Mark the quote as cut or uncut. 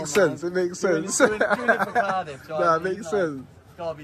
uncut